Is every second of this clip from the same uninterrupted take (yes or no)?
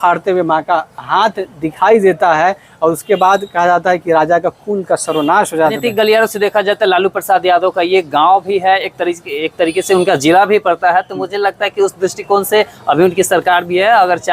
no